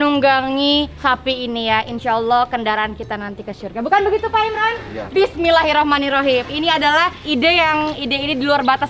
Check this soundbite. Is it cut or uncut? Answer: uncut